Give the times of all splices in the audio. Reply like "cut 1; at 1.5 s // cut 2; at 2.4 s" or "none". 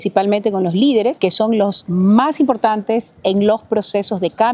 cut 1; at 1.6 s